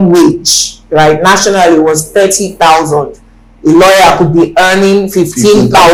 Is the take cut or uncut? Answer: uncut